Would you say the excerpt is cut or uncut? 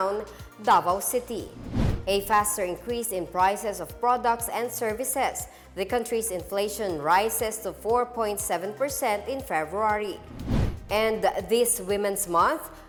uncut